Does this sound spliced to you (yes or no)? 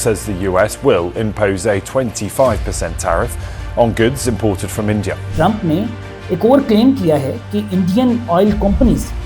yes